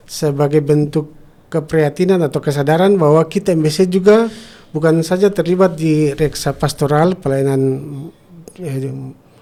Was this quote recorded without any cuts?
yes; 0 cuts

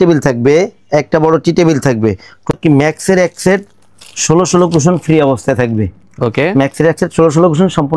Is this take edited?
yes; 1 cut; at 2.5 s

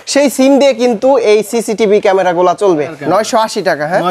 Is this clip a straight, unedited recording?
no; 1 cut; at 3.0 s

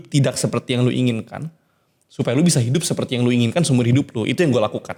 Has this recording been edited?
no; 0 cuts

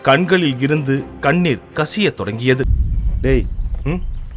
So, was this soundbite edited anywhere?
yes; 1 cut; at 2.8 s

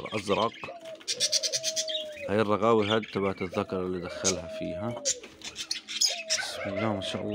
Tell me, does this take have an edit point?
no; 0 cuts

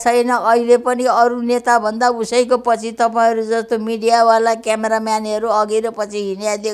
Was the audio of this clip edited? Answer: no; 0 cuts

